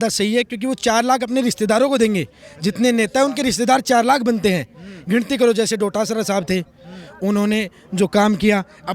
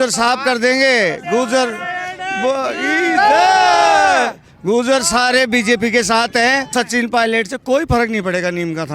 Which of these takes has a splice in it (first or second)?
second